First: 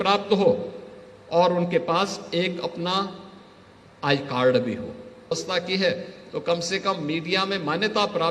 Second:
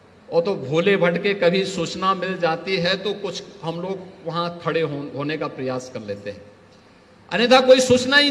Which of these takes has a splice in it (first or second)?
first